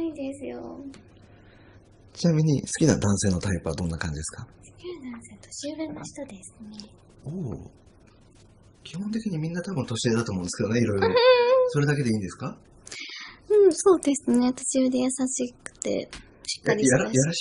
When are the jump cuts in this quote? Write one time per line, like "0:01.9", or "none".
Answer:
0:15.2